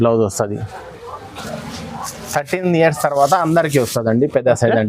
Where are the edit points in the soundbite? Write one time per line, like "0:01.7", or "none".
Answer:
0:01.4